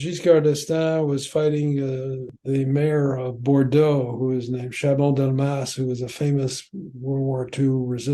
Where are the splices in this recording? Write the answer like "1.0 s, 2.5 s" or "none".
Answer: 2.3 s